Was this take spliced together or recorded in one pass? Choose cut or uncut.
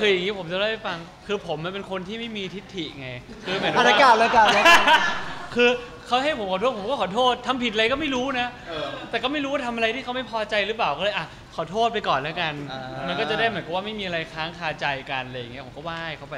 uncut